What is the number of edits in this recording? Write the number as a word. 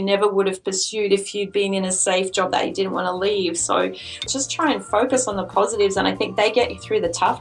one